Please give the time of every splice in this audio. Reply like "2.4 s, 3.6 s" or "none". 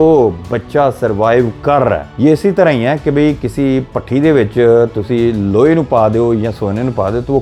none

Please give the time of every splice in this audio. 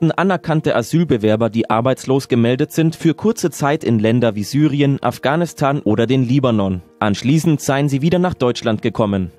5.5 s

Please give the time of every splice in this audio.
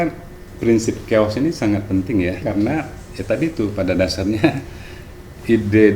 2.4 s

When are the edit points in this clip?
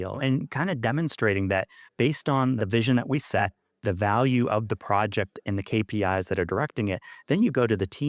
2.6 s

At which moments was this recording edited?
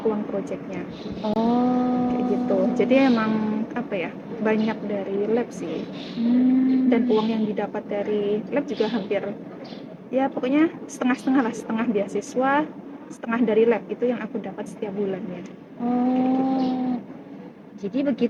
none

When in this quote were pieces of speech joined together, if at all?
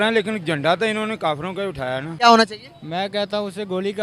2.1 s

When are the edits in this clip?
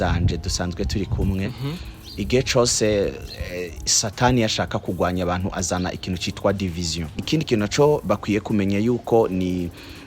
7.2 s

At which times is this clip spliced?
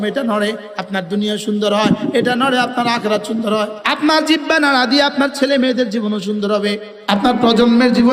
3.8 s, 6.9 s

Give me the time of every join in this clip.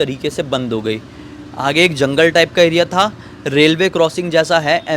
none

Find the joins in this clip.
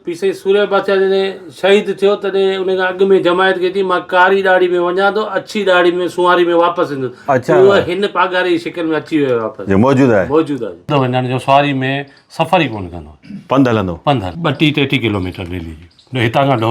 10.9 s, 14.3 s

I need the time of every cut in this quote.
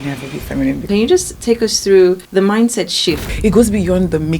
0.9 s, 3.3 s

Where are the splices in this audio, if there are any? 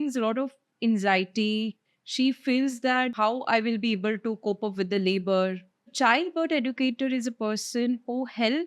1.8 s, 3.1 s, 5.9 s

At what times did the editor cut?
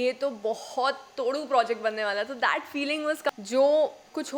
3.3 s

